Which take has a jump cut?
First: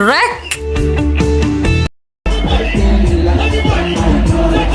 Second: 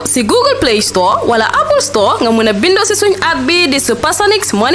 first; 1 cut; at 1.9 s

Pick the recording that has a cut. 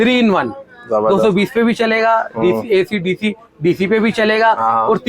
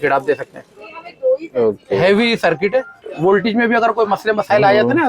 second; 1 cut; at 3.0 s

